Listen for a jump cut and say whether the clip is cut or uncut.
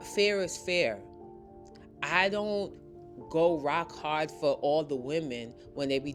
uncut